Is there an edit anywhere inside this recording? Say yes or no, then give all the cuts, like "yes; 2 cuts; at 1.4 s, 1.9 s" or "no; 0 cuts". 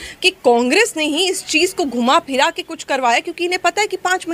no; 0 cuts